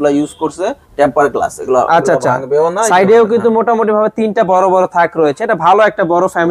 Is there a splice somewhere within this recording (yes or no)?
no